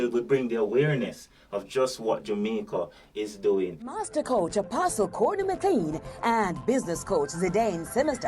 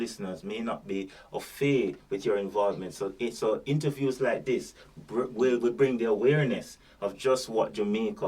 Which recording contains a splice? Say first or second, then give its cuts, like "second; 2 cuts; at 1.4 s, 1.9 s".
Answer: first; 1 cut; at 3.9 s